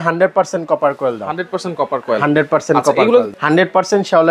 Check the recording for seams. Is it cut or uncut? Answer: cut